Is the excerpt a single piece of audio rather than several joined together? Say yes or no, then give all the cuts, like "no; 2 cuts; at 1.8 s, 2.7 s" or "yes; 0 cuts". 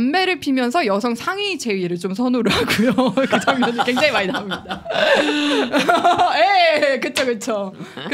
yes; 0 cuts